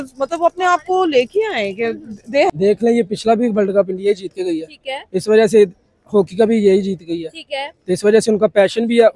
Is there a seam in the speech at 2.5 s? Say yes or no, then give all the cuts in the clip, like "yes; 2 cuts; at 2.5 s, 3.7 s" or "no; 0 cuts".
yes; 1 cut; at 2.5 s